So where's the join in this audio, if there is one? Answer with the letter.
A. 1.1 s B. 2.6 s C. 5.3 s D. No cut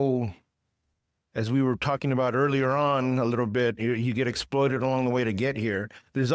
D